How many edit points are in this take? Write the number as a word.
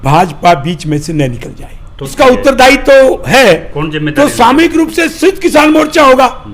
one